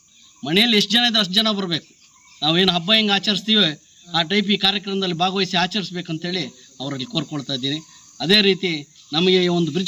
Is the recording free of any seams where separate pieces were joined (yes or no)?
yes